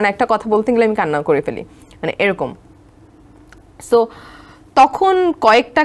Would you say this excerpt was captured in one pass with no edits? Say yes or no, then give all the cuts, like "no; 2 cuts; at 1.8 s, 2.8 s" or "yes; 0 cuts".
yes; 0 cuts